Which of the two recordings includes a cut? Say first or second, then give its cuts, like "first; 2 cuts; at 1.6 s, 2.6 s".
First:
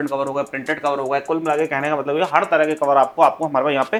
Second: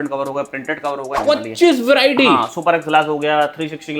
second; 1 cut; at 1.2 s